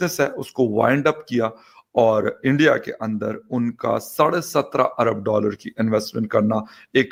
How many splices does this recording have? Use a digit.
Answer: 0